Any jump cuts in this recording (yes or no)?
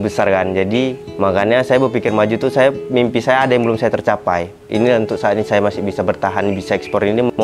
yes